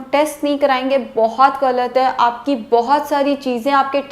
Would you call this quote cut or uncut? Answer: uncut